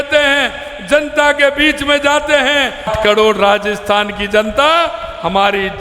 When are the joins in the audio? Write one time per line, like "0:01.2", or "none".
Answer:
0:02.9